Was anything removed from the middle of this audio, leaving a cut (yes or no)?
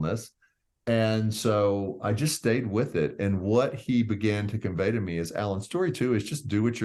no